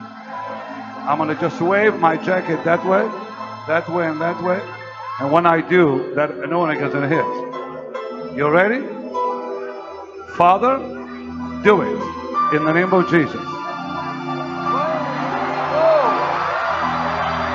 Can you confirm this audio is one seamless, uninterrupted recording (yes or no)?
yes